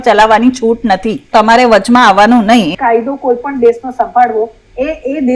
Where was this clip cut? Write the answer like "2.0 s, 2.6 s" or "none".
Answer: 1.3 s, 2.7 s